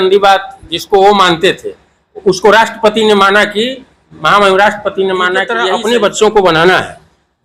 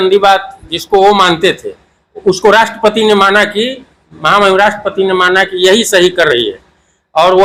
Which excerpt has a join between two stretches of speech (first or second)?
first